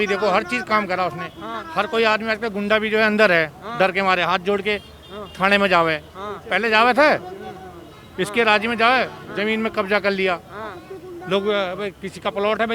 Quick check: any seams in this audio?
no; 0 cuts

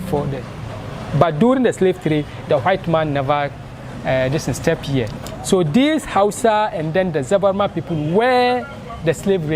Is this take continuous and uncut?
no; 1 cut; at 5.1 s

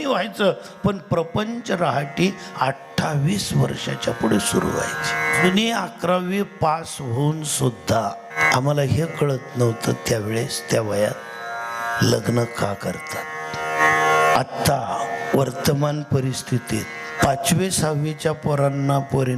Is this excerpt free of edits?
no; 4 cuts; at 5.4 s, 8.4 s, 13.8 s, 17.2 s

